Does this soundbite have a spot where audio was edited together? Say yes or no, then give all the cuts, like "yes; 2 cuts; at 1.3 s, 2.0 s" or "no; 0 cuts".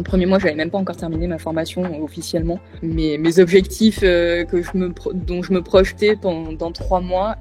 no; 0 cuts